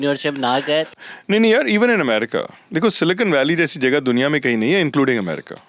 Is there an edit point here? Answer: yes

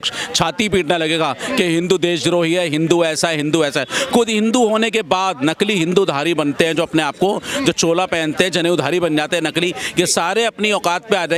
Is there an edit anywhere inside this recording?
no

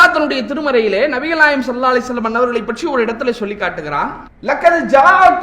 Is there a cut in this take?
yes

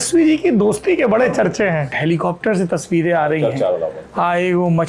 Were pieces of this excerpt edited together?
yes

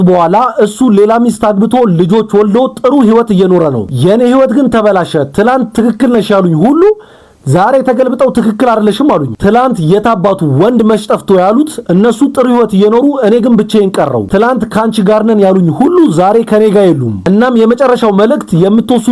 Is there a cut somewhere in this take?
no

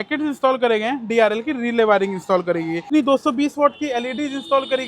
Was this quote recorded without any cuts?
no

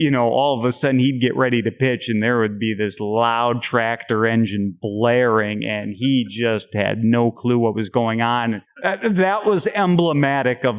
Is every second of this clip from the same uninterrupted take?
no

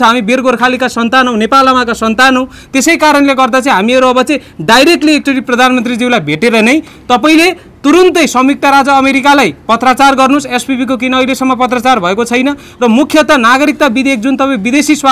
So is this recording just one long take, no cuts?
yes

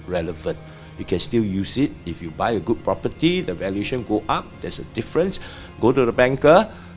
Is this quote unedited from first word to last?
yes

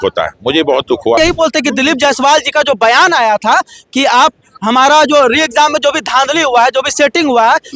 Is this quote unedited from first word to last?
no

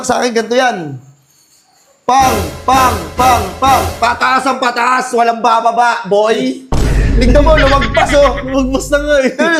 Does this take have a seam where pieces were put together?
no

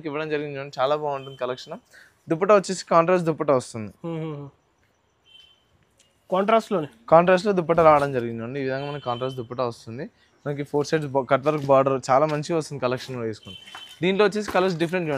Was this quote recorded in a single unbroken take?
yes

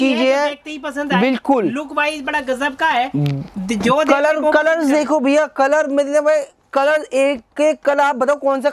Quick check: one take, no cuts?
yes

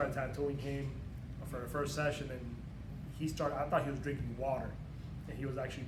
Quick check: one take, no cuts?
yes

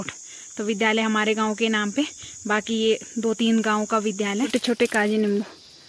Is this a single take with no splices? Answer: no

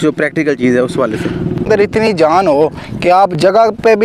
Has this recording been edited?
yes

